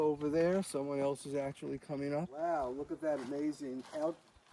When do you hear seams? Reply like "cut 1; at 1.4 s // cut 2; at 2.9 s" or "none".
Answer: cut 1; at 2.3 s

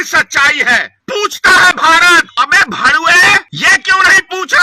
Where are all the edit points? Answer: cut 1; at 1.0 s // cut 2; at 2.3 s // cut 3; at 3.5 s

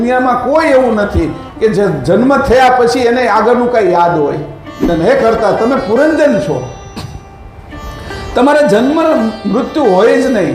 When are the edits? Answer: cut 1; at 4.9 s

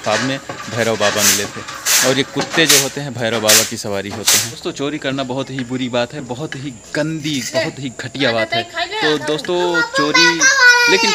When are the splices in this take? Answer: cut 1; at 4.6 s

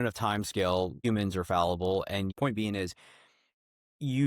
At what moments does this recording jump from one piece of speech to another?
cut 1; at 1.0 s // cut 2; at 2.3 s

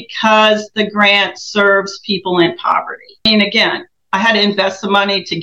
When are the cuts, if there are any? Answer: cut 1; at 3.3 s

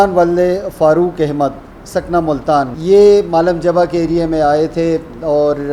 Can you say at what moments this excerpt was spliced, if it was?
cut 1; at 2.8 s

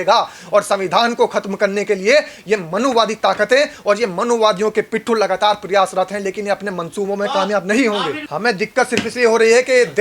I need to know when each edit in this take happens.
cut 1; at 8.2 s

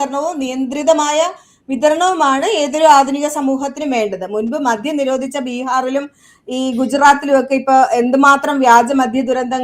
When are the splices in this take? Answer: none

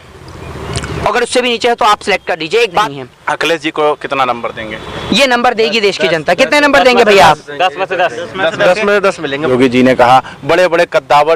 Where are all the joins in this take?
cut 1; at 2.9 s // cut 2; at 9.5 s

